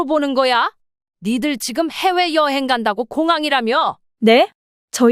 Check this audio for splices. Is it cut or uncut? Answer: cut